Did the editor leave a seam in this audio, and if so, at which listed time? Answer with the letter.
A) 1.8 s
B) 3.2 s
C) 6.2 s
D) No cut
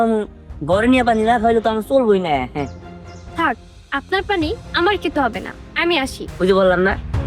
C